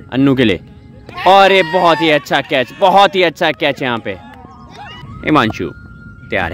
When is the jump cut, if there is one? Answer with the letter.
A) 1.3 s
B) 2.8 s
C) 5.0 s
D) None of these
C